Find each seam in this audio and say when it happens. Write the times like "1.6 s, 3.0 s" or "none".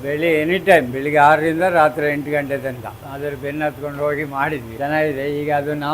2.9 s